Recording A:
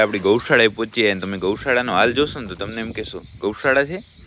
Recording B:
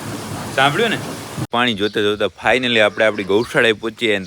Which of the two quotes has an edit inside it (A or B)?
B